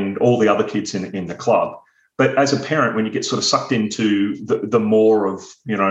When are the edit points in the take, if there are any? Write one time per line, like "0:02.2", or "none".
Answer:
none